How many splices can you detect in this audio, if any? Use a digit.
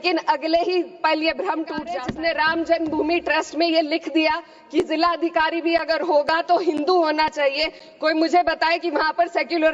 1